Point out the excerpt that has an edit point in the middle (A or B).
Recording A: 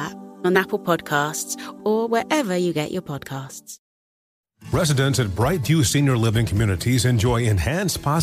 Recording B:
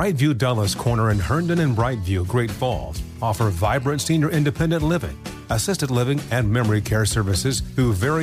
A